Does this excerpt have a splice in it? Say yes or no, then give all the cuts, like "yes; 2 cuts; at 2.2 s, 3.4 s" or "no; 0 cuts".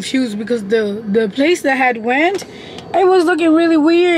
no; 0 cuts